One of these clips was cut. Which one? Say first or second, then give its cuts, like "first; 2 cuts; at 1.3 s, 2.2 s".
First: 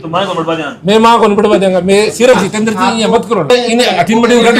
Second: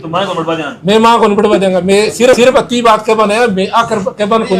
first; 2 cuts; at 2.4 s, 3.5 s